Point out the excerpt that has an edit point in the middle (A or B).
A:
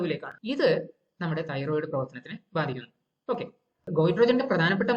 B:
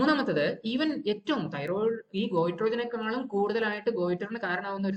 A